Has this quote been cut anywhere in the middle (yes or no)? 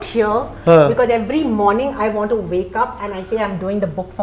no